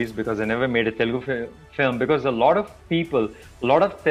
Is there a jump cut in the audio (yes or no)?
no